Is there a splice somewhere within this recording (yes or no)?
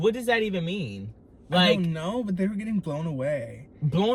no